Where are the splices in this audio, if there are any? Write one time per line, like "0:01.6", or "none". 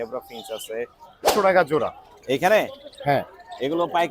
0:01.3